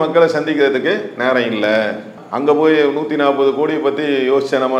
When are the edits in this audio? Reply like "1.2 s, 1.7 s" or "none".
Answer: none

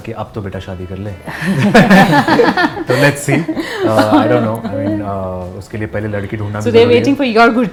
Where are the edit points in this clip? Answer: none

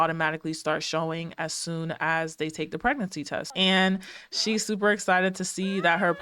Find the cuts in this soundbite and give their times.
3.5 s

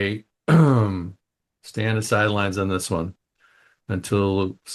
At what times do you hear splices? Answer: 1.9 s

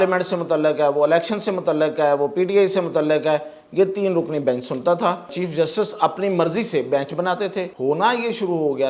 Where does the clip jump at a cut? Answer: 5.4 s, 7.7 s

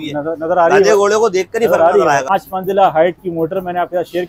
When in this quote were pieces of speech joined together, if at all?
2.3 s

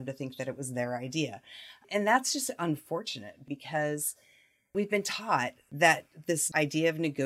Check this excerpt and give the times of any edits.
1.8 s, 3.5 s, 4.7 s, 5.6 s, 6.4 s

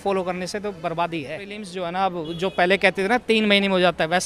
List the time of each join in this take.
1.7 s

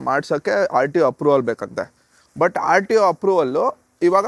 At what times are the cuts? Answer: none

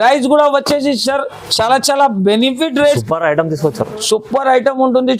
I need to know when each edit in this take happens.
3.0 s

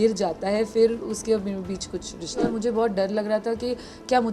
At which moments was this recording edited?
2.5 s

